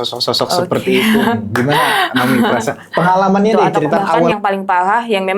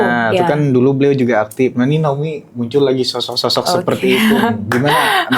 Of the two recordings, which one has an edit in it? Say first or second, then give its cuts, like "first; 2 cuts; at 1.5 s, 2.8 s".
first; 1 cut; at 4.3 s